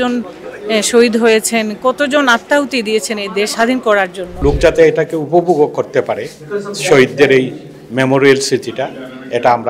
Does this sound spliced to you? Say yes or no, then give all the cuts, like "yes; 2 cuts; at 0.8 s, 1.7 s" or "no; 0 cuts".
yes; 2 cuts; at 3.5 s, 4.4 s